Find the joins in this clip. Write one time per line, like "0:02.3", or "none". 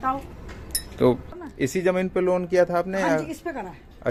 none